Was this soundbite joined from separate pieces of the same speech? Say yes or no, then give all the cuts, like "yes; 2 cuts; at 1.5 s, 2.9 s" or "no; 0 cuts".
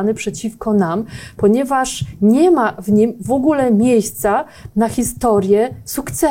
no; 0 cuts